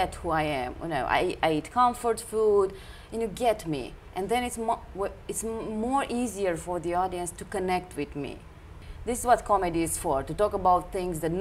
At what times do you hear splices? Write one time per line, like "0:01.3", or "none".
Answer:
0:08.7